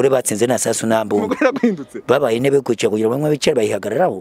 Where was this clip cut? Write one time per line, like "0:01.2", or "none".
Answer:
none